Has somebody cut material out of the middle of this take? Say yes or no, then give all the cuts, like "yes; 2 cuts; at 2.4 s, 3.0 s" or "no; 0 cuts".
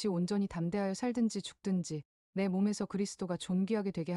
no; 0 cuts